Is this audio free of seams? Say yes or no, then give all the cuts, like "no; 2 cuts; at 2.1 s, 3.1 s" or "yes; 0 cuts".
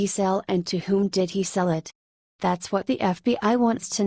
yes; 0 cuts